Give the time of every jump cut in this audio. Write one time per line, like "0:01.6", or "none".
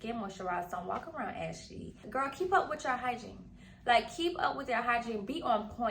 0:02.0